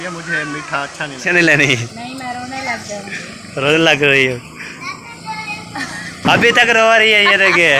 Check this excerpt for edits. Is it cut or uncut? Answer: cut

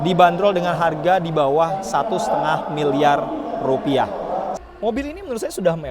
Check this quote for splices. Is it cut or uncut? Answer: cut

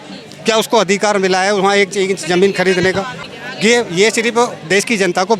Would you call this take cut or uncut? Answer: cut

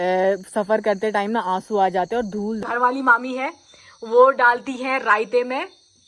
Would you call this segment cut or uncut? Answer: cut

